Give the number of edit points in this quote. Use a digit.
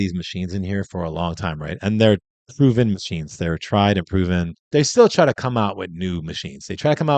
1